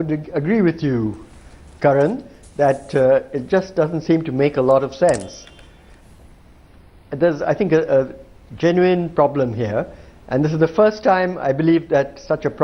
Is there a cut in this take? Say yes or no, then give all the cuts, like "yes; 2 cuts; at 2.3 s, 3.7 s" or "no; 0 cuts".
yes; 1 cut; at 2.6 s